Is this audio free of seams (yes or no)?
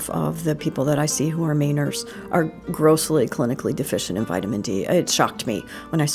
yes